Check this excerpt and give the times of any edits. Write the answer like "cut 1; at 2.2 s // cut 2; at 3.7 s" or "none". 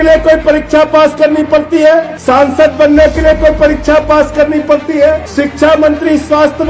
cut 1; at 2.1 s // cut 2; at 5.3 s